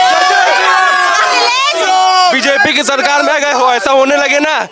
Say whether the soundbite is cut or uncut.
uncut